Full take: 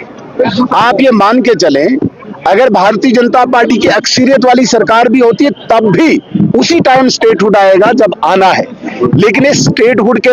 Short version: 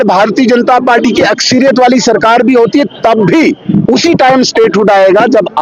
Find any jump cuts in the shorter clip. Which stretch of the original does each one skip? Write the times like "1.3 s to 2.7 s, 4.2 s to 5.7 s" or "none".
none